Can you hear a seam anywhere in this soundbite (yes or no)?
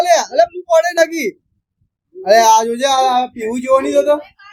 no